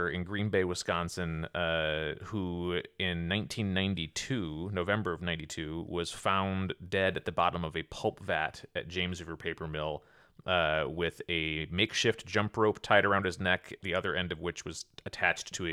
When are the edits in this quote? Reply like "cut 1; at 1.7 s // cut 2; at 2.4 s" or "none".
none